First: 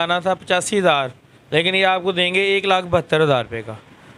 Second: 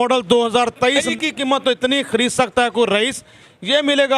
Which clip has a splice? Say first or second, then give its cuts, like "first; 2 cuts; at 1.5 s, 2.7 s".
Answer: second; 1 cut; at 1.1 s